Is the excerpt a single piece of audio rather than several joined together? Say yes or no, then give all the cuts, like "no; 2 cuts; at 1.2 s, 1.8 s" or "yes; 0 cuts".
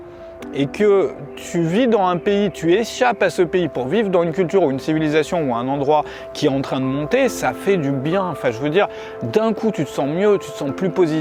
yes; 0 cuts